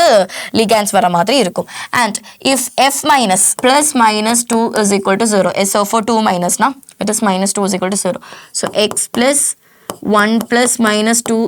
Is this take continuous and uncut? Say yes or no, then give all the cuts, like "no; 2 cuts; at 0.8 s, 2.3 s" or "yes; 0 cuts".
no; 1 cut; at 3.5 s